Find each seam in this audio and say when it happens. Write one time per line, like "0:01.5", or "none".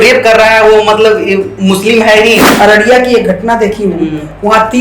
0:02.5